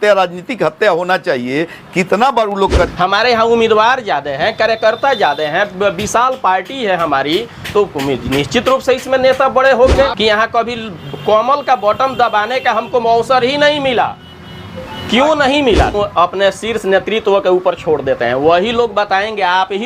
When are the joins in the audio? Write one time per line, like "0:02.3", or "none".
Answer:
0:02.9
0:10.1
0:15.9